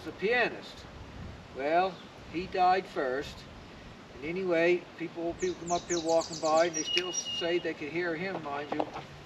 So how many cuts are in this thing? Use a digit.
0